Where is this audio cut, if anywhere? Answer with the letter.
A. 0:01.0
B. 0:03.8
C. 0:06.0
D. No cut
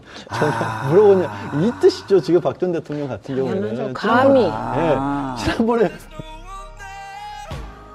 C